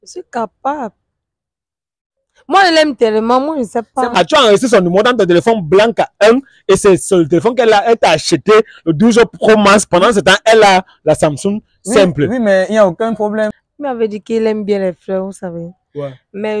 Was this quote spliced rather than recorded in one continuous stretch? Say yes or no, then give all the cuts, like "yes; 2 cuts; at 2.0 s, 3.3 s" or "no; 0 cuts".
yes; 2 cuts; at 4.1 s, 13.5 s